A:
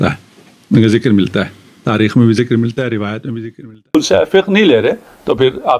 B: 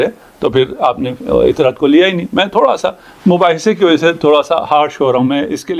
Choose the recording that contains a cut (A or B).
A